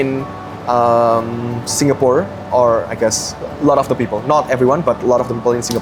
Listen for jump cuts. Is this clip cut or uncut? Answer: uncut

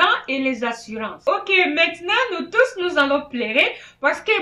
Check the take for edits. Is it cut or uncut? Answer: cut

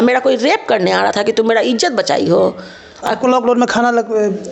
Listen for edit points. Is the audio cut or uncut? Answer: uncut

